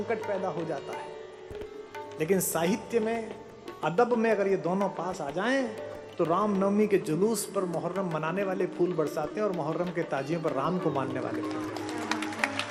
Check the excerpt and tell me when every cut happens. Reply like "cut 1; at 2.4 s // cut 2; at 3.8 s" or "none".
none

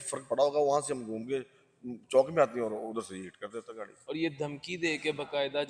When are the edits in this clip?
cut 1; at 3.8 s

